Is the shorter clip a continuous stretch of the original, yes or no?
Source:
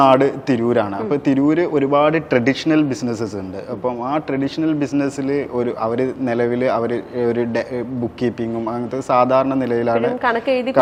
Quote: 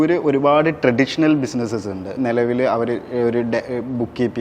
no